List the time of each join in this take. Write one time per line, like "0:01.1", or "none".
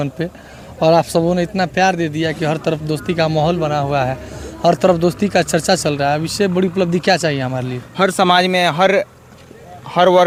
none